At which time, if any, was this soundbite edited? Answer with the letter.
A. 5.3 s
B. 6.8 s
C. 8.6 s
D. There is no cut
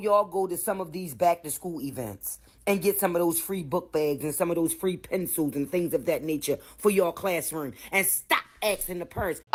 D